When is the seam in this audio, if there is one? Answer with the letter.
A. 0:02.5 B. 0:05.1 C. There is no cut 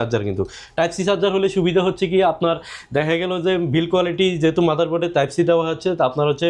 C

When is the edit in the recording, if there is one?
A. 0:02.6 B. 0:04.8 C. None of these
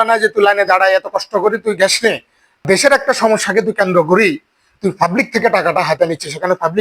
A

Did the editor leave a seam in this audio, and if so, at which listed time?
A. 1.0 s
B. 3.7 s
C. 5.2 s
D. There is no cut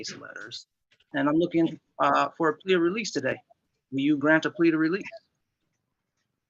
A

